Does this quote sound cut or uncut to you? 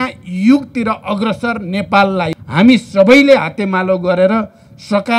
cut